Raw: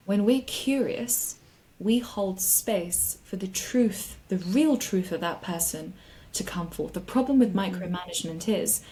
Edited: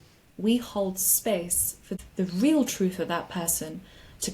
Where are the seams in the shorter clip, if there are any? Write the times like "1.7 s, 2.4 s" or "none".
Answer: 2.0 s